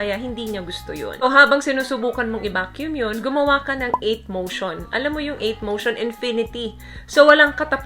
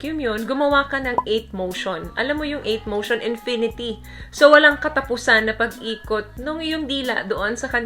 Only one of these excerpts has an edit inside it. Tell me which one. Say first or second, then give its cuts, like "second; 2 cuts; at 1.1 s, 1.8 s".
first; 1 cut; at 1.2 s